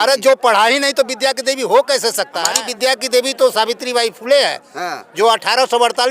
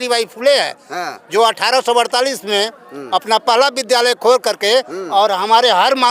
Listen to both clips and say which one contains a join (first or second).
first